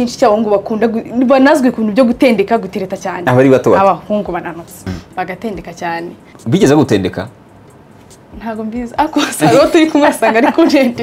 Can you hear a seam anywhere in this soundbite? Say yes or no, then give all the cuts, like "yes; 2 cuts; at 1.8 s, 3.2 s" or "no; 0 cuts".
yes; 2 cuts; at 4.8 s, 6.3 s